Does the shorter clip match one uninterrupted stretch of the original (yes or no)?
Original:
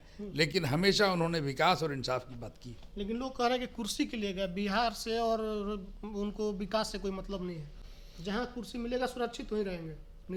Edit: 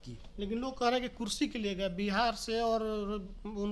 yes